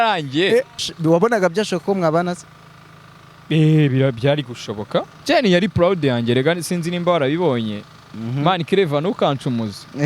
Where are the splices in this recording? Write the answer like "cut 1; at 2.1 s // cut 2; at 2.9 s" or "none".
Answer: cut 1; at 0.9 s // cut 2; at 5.1 s